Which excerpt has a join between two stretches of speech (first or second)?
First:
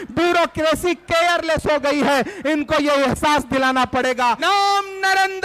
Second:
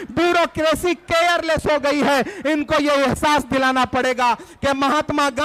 first